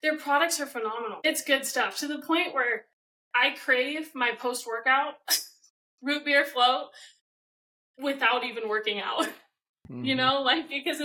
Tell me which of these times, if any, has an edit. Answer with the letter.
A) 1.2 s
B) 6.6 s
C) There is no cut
A